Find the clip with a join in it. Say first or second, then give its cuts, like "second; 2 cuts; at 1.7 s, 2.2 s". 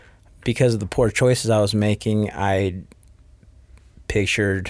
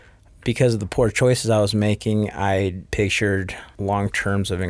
second; 2 cuts; at 2.8 s, 3.6 s